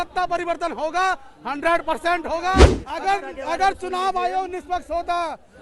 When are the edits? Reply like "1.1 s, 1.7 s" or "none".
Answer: 2.8 s